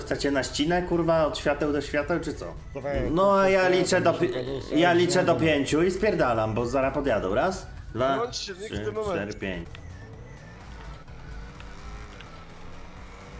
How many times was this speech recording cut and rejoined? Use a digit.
2